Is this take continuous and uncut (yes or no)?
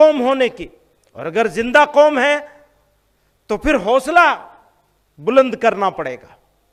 yes